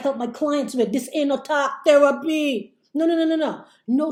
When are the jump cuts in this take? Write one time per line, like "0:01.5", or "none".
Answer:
none